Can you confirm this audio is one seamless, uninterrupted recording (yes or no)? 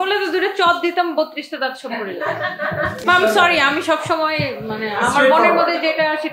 yes